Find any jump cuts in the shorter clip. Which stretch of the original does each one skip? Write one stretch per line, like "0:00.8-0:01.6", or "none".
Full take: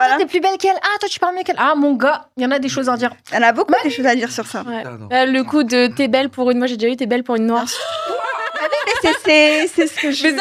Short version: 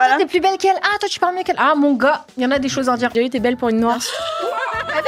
0:03.1-0:06.8